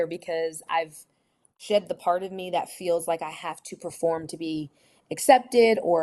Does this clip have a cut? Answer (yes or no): yes